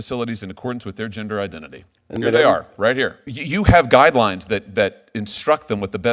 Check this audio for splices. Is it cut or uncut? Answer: cut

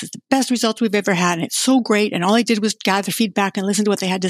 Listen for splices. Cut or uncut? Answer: uncut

